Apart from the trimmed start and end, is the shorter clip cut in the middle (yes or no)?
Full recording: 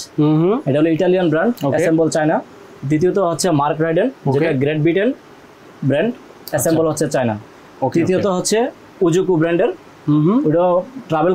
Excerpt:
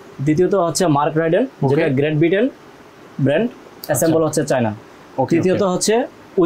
no